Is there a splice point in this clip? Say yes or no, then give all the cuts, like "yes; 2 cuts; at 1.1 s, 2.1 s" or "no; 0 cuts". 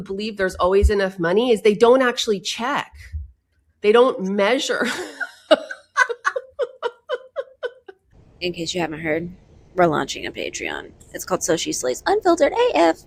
no; 0 cuts